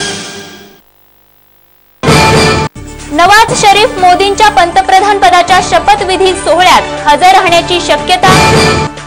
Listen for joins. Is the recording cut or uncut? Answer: cut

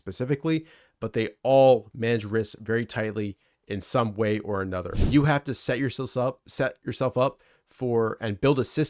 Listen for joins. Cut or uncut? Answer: cut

